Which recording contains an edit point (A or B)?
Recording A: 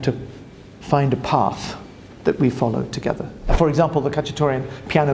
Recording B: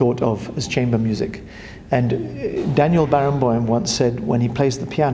A